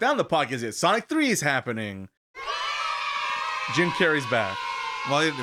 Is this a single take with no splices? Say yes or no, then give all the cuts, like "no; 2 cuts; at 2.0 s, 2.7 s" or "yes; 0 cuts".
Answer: no; 1 cut; at 2.1 s